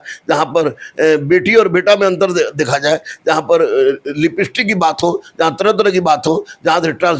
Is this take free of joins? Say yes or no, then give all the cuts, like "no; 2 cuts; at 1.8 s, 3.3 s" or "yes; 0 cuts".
yes; 0 cuts